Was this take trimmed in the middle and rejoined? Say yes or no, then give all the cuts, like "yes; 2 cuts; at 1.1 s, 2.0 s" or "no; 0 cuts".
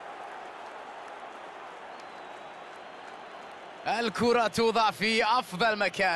no; 0 cuts